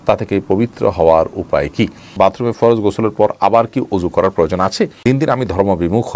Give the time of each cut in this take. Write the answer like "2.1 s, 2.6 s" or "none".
2.1 s, 5.0 s